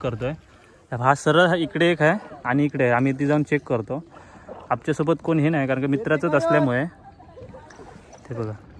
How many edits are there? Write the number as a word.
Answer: zero